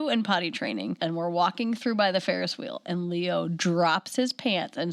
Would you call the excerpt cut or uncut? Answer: cut